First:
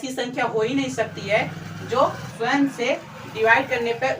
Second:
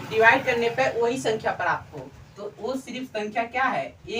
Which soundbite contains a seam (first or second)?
first